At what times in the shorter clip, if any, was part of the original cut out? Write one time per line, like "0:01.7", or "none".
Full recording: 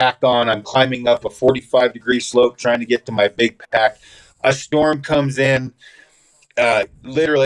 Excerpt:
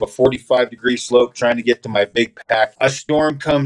0:02.7